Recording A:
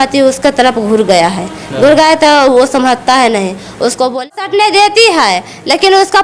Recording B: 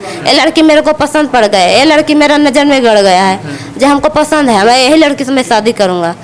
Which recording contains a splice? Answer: A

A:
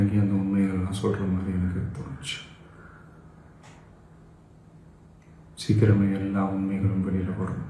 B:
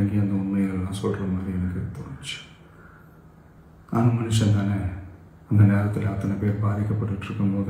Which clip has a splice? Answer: B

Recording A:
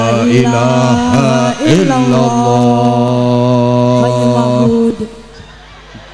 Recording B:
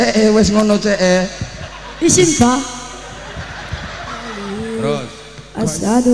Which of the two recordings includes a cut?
B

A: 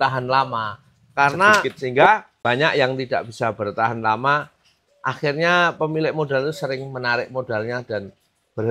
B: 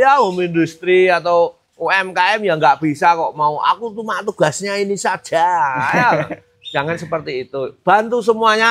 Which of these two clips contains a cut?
A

